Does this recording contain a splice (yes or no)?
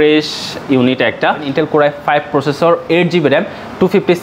yes